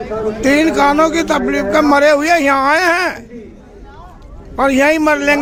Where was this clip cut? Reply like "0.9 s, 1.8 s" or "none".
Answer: none

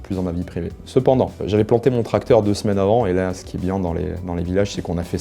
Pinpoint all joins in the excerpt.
1.4 s

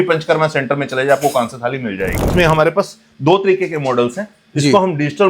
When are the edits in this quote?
2.3 s

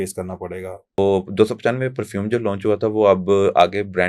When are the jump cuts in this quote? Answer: 1.0 s

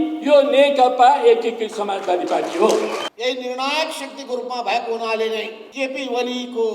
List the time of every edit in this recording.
3.1 s, 5.6 s

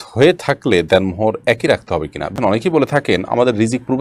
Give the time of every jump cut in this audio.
2.3 s

